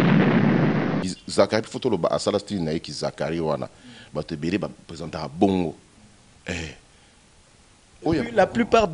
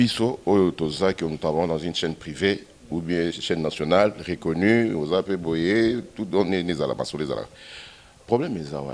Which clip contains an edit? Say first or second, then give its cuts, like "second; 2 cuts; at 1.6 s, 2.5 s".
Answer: first; 1 cut; at 1.2 s